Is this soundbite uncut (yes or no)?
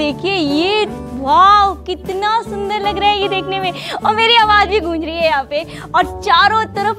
yes